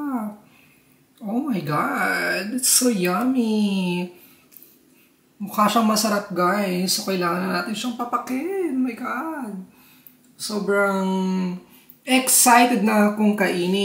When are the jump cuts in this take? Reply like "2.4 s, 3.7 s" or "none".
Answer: none